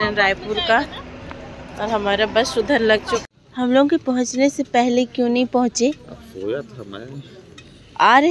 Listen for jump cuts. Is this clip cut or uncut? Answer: cut